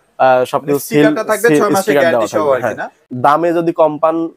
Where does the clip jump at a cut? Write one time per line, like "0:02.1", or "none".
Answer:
0:03.1